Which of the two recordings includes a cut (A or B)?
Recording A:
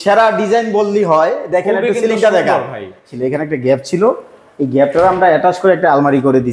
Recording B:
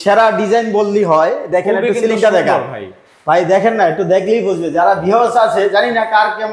A